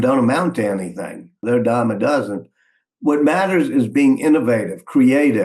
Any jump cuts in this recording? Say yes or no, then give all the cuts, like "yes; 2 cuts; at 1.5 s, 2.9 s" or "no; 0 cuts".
yes; 1 cut; at 1.4 s